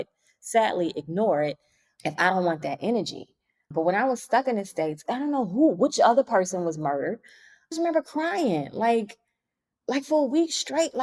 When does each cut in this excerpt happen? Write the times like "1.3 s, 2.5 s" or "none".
5.0 s, 7.7 s